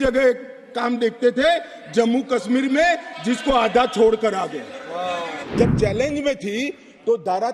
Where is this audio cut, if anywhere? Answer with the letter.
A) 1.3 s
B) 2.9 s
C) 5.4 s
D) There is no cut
C